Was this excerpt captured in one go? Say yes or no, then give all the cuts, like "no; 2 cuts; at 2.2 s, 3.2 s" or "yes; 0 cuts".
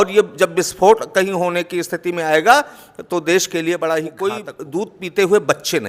no; 1 cut; at 4.5 s